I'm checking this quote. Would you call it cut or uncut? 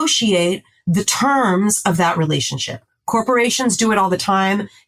uncut